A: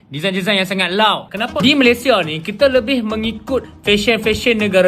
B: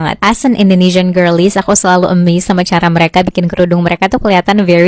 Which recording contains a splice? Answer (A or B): A